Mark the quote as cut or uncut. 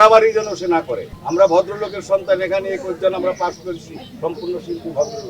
uncut